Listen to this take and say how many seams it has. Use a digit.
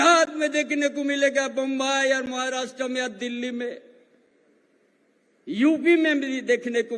0